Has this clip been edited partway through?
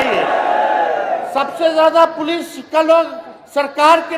no; 0 cuts

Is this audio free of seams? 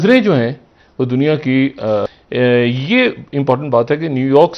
yes; 0 cuts

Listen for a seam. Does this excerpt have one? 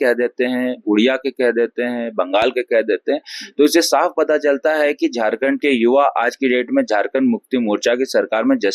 no; 0 cuts

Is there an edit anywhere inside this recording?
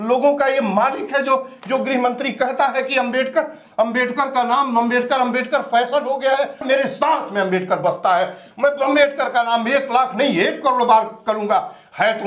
yes; 1 cut; at 6.6 s

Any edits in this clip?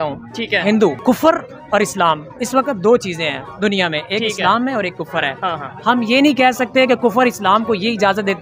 yes; 1 cut; at 1.0 s

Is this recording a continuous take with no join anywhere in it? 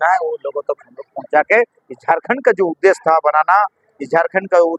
yes; 0 cuts

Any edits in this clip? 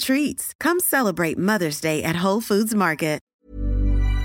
yes; 1 cut; at 3.3 s

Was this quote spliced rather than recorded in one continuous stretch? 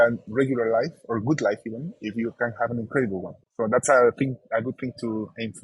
yes; 1 cut; at 3.4 s

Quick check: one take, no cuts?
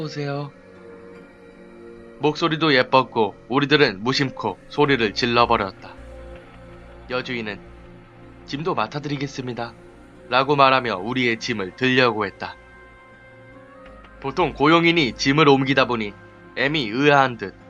no; 1 cut; at 5.9 s

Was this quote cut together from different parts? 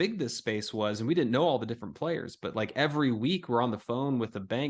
no; 0 cuts

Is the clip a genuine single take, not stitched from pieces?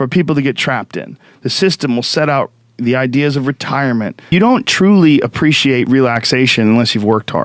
no; 1 cut; at 4.3 s

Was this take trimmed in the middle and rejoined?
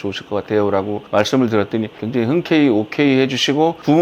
no; 0 cuts

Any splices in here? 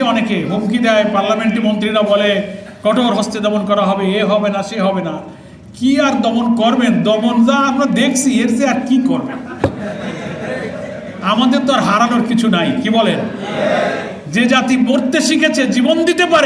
no; 0 cuts

